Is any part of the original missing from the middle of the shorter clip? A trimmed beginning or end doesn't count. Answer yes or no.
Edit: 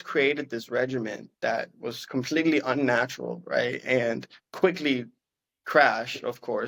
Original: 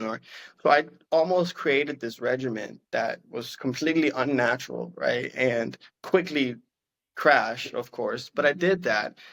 no